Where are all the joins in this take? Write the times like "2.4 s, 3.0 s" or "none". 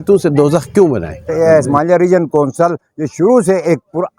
1.3 s